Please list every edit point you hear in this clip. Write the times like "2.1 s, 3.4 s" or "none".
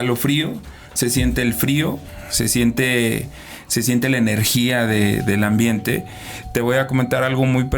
none